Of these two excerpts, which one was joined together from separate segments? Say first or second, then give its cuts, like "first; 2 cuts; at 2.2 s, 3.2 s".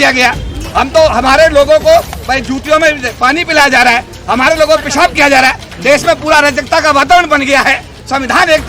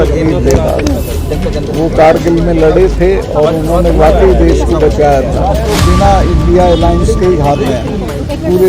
second; 1 cut; at 5.7 s